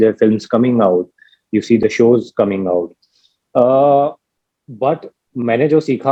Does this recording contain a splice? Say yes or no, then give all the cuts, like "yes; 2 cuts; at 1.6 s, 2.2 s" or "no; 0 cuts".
no; 0 cuts